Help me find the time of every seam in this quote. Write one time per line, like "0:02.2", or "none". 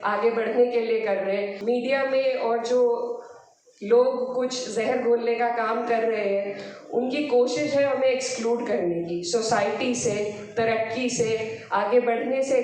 0:01.5